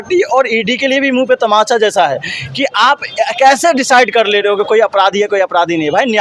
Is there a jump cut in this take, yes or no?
no